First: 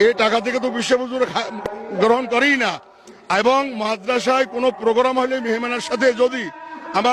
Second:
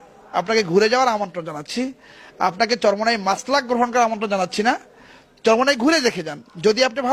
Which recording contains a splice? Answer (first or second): first